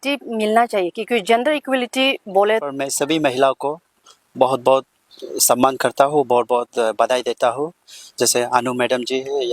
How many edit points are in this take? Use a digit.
1